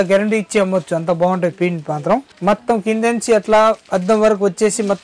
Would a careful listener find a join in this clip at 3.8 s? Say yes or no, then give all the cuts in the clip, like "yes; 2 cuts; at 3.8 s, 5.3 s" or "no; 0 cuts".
no; 1 cut; at 2.3 s